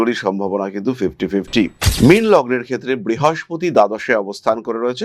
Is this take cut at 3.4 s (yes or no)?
no